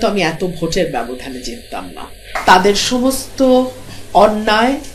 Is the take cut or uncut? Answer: cut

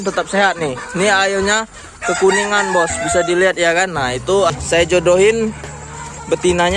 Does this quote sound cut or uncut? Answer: cut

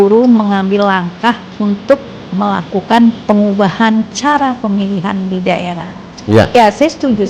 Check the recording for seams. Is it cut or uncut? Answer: uncut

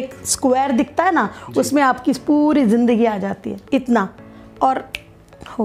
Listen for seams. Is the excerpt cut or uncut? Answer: cut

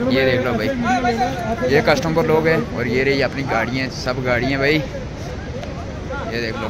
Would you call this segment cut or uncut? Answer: uncut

